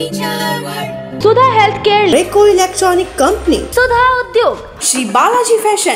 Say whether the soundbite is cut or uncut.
uncut